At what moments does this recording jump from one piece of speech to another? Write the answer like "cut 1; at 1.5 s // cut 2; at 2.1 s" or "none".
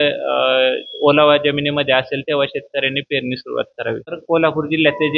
cut 1; at 4.1 s